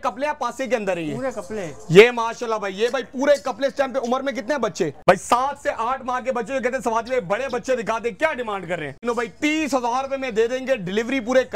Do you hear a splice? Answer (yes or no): yes